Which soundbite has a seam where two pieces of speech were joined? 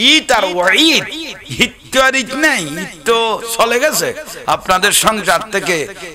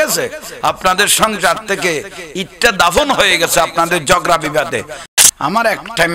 second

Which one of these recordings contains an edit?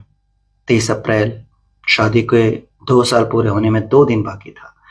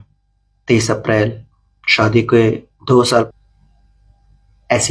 second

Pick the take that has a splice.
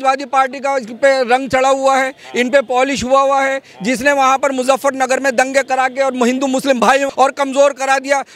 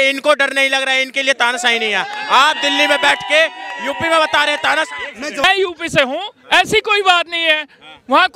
second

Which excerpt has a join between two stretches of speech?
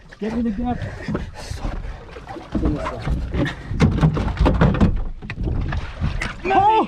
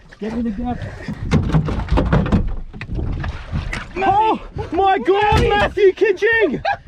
second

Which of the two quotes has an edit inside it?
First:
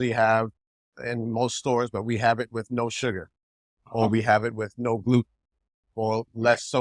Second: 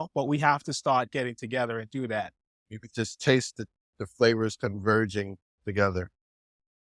second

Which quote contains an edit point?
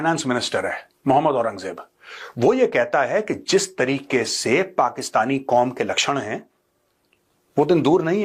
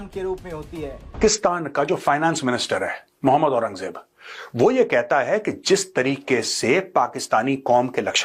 second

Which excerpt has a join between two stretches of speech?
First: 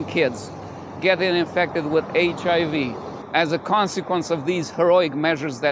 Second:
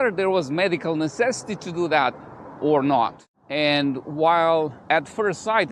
second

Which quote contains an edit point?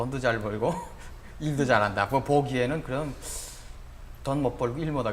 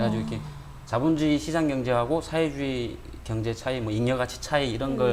first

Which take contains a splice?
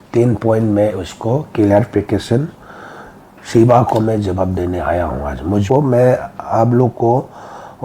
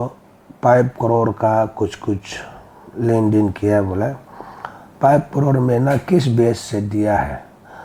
first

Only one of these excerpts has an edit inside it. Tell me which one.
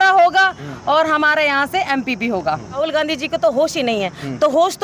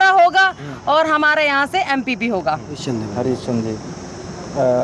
first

